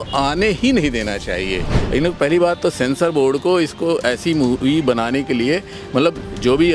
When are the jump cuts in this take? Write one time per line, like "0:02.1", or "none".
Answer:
0:01.8